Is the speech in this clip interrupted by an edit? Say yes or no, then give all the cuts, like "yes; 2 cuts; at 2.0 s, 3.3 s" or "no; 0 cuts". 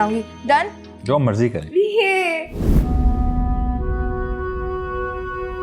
no; 0 cuts